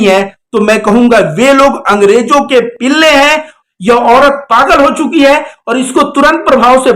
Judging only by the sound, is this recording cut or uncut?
cut